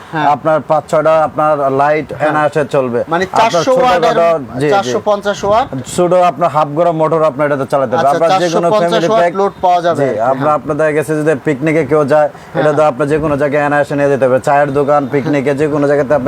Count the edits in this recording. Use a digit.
0